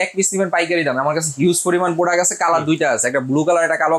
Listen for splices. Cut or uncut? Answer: uncut